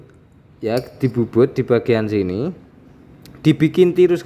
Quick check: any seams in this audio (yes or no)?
no